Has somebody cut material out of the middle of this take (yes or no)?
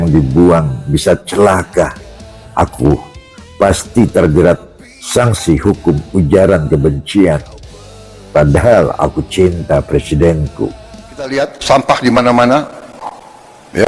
yes